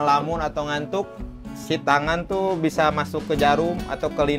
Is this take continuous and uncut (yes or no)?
yes